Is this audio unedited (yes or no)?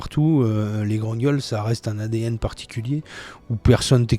yes